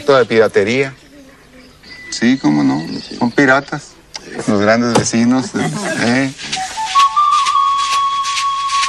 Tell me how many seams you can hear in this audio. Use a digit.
0